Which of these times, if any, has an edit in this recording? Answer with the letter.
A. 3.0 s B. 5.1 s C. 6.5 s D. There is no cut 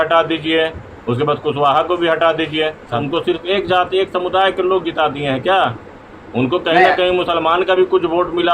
A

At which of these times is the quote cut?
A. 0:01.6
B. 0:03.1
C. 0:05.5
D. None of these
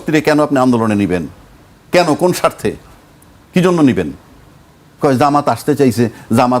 D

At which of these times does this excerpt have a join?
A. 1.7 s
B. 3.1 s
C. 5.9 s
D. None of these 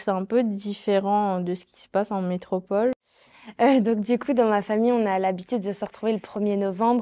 B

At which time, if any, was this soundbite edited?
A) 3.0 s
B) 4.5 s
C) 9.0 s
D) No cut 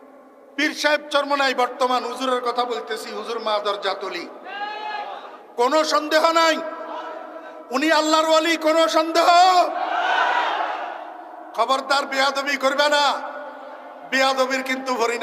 D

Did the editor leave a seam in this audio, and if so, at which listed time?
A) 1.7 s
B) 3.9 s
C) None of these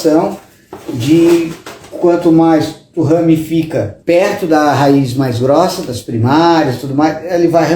B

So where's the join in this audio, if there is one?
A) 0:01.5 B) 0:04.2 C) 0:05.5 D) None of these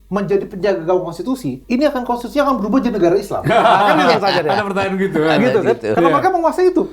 A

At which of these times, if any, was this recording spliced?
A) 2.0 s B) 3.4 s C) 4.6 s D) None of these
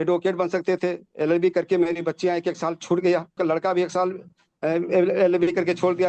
B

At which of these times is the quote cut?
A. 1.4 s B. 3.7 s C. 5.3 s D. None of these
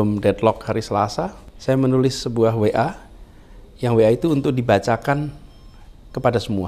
A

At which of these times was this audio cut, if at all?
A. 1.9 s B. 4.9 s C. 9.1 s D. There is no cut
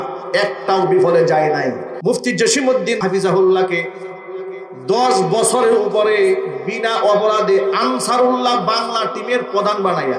A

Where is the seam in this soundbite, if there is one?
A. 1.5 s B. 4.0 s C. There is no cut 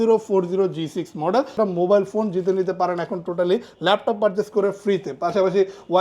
A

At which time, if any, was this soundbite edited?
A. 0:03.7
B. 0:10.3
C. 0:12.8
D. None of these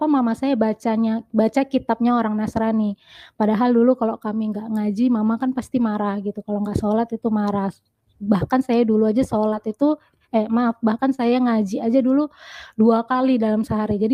D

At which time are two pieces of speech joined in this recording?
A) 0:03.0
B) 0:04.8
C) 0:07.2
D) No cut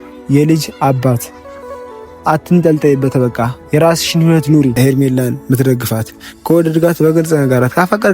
B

